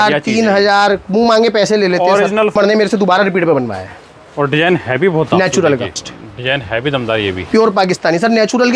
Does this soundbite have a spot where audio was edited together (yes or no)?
yes